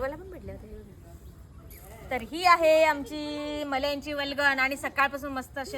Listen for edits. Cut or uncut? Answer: cut